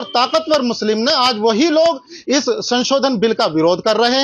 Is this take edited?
no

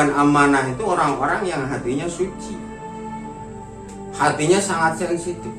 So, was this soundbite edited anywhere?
yes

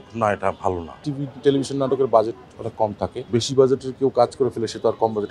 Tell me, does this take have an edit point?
yes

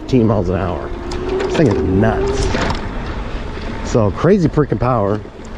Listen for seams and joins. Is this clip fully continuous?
yes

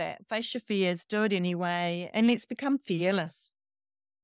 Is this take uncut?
yes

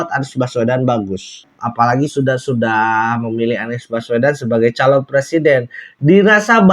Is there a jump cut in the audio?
yes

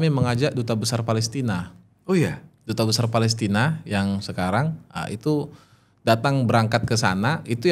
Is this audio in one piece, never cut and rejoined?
yes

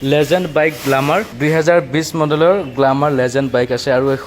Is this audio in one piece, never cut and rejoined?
no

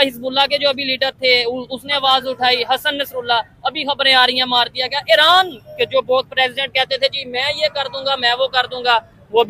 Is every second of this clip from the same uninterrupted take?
yes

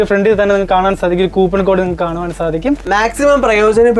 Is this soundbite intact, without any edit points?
no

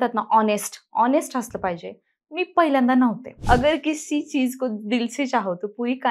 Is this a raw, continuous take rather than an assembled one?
no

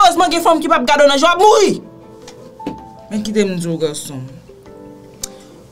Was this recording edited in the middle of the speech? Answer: no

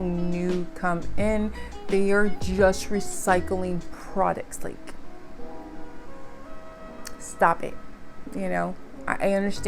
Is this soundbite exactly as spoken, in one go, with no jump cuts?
yes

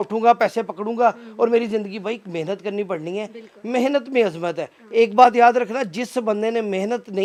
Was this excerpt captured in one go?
yes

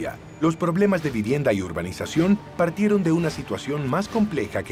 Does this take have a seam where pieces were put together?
no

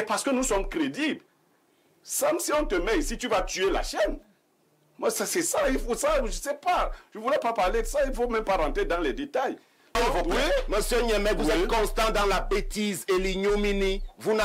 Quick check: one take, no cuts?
no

